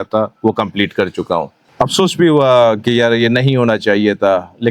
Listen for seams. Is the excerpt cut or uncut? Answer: cut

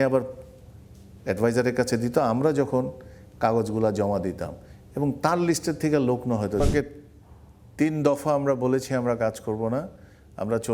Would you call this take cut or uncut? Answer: cut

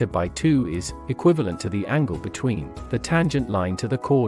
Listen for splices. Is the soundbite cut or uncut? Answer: uncut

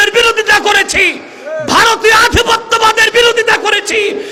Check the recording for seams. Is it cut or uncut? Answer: uncut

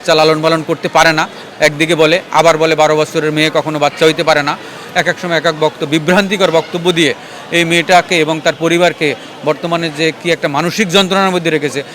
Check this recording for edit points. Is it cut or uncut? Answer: uncut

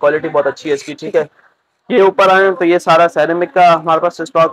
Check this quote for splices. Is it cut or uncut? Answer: uncut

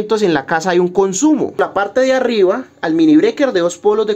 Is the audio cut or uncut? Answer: cut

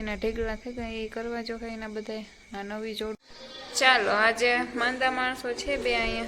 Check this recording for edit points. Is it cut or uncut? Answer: cut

